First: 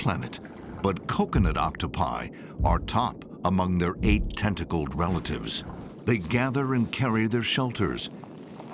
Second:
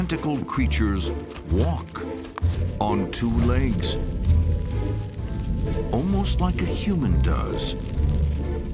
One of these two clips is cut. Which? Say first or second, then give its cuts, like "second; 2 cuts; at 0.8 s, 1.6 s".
first; 1 cut; at 5.8 s